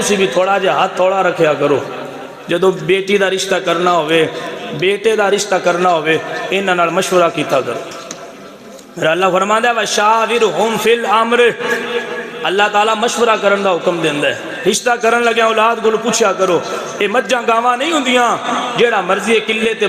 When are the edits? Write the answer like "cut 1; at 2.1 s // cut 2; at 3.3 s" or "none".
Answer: cut 1; at 14.5 s